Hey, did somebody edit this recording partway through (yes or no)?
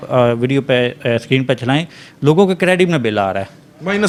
no